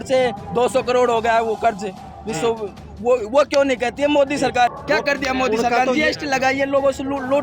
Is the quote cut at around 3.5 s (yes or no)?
no